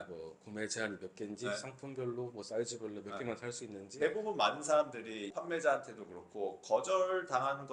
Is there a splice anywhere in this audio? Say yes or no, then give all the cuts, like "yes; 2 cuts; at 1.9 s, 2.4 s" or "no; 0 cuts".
yes; 2 cuts; at 4.0 s, 5.3 s